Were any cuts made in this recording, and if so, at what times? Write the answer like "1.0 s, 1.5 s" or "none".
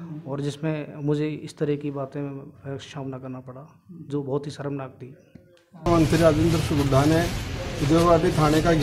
5.9 s